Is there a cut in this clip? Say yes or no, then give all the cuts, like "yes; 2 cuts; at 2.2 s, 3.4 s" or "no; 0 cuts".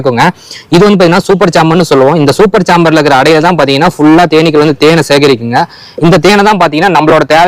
no; 0 cuts